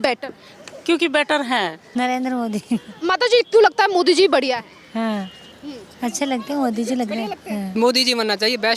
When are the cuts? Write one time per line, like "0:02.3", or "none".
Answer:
0:01.8
0:07.8